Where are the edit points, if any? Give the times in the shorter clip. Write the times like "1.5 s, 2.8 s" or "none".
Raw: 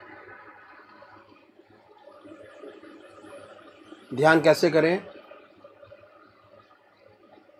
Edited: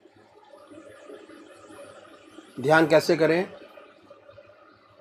none